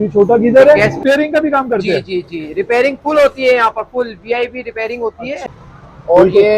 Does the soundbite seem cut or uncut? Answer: cut